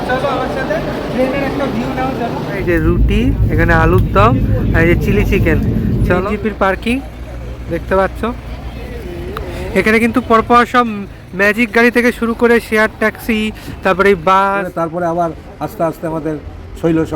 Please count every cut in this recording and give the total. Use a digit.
3